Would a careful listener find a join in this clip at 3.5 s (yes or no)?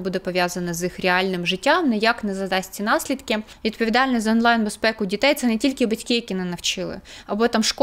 yes